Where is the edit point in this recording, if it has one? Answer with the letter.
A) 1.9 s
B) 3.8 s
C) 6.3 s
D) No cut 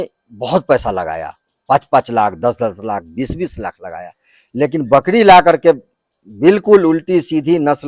D